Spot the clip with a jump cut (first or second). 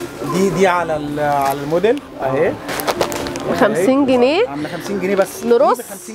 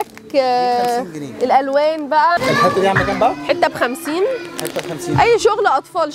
second